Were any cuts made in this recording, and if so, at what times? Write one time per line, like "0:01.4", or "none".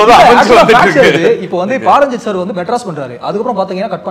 none